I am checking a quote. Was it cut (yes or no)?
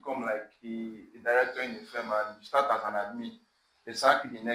no